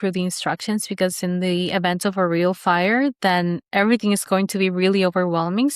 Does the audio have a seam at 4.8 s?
no; 0 cuts

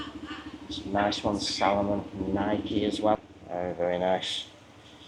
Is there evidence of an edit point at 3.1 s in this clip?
yes; 1 cut; at 3.1 s

